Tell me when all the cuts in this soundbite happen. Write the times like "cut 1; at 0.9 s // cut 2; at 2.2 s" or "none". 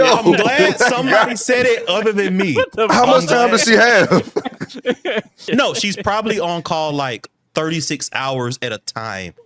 none